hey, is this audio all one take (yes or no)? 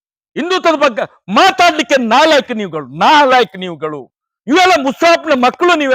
yes